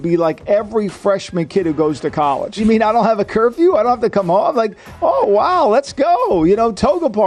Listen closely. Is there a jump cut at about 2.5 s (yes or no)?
yes